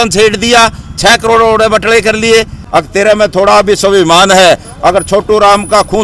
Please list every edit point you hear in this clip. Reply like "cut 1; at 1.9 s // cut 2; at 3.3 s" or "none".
cut 1; at 2.6 s